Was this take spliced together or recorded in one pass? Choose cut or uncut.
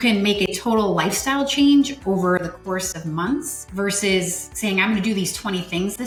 uncut